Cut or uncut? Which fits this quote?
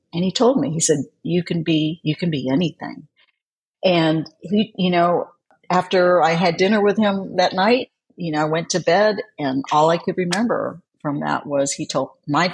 cut